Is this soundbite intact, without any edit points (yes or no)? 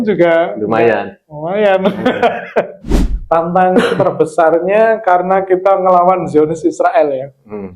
no